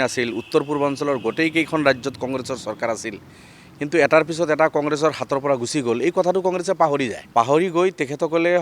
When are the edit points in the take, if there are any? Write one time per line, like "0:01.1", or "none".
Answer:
0:07.2